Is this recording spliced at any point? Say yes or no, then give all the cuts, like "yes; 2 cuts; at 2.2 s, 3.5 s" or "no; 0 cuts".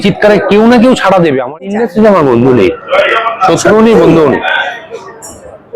yes; 1 cut; at 1.7 s